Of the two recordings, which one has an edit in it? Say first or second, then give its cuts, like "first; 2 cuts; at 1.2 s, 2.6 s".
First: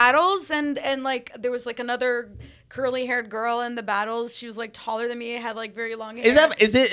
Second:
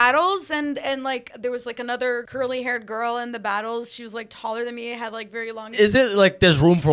second; 2 cuts; at 2.3 s, 5.7 s